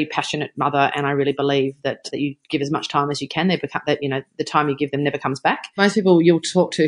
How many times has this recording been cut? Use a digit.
2